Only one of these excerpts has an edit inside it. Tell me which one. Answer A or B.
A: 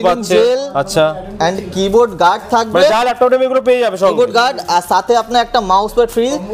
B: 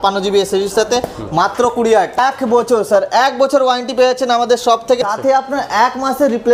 B